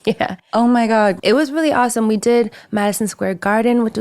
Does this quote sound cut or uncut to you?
cut